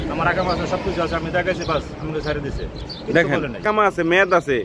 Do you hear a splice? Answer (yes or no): yes